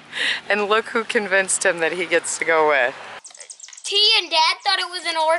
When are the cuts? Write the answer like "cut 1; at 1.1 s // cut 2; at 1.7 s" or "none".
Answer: cut 1; at 3.3 s